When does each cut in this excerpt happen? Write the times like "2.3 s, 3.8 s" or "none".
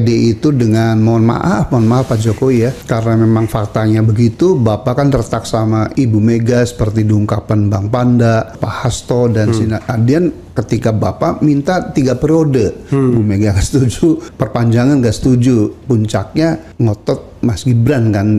2.8 s, 5.9 s, 8.6 s, 10.5 s, 14.3 s, 16.7 s